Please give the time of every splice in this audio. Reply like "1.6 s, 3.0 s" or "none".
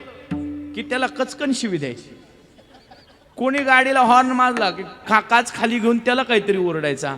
5.0 s